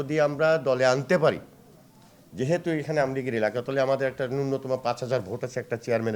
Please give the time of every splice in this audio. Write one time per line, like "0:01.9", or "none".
none